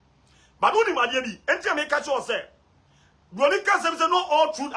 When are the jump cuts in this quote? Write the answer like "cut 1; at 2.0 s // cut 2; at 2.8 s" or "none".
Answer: none